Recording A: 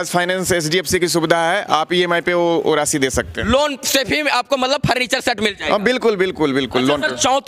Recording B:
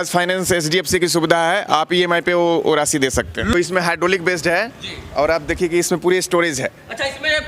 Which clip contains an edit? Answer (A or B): B